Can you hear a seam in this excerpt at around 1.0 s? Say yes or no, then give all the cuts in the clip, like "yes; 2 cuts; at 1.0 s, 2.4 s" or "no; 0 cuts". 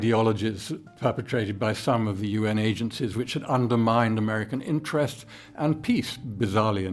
no; 0 cuts